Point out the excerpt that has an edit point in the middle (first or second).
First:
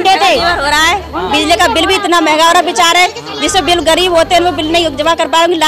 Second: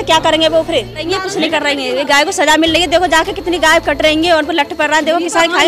second